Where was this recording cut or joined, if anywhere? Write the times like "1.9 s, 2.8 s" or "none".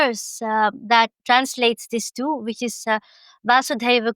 1.2 s